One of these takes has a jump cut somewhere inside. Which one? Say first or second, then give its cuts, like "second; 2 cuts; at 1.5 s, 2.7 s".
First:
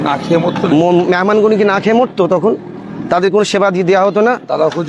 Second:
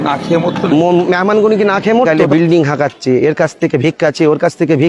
second; 1 cut; at 2.1 s